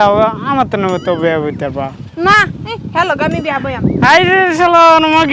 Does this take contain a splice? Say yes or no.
no